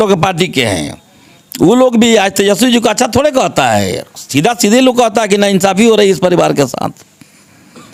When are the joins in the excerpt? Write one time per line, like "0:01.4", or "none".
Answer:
none